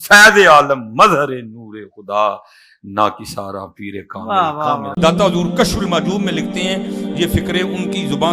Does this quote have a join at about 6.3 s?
no; 1 cut; at 4.9 s

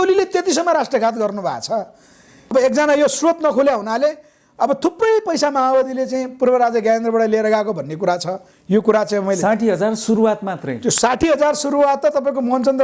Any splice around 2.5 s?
yes; 1 cut; at 2.5 s

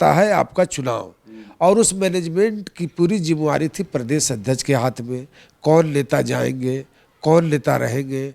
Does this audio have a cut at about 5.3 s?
no; 0 cuts

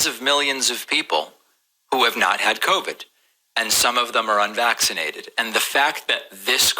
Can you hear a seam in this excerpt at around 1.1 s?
no; 2 cuts; at 4.0 s, 5.5 s

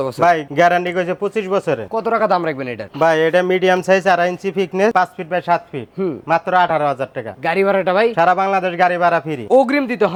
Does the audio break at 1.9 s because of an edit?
no; 0 cuts

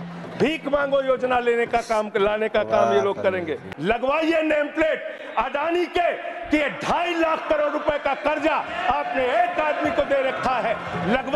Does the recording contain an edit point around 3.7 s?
yes; 1 cut; at 3.7 s

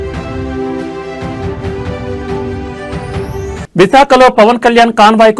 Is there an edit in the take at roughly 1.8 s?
no; 1 cut; at 3.1 s

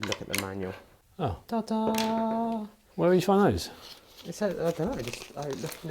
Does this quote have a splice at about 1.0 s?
yes; 1 cut; at 1.0 s

